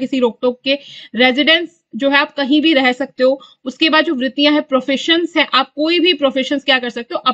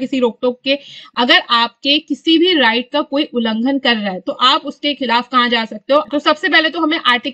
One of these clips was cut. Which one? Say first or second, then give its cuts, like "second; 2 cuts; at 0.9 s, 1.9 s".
second; 2 cuts; at 1.0 s, 6.1 s